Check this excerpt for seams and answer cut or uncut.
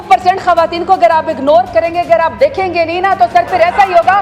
uncut